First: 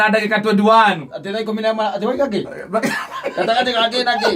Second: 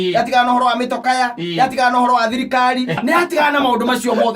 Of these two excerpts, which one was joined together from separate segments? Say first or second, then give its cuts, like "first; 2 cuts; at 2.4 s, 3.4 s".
second; 1 cut; at 3.0 s